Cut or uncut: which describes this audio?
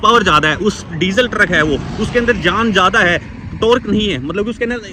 uncut